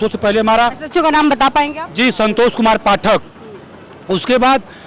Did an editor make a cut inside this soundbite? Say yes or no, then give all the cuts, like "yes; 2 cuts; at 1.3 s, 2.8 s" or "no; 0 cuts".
no; 0 cuts